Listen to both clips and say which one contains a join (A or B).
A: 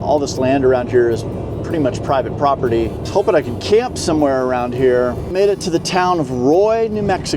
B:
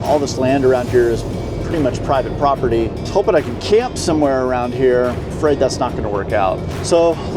A